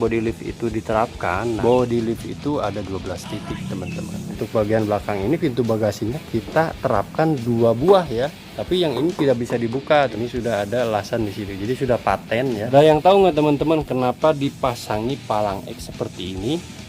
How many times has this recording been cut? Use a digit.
5